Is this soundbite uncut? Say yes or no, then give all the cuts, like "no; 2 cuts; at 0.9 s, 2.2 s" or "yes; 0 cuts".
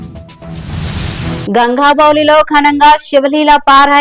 no; 1 cut; at 1.4 s